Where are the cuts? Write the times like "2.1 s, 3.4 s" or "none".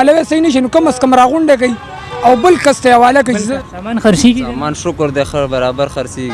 3.5 s

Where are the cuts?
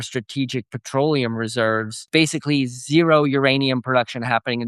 2.1 s

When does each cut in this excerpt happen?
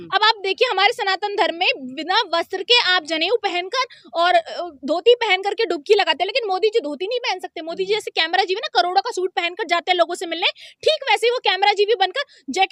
none

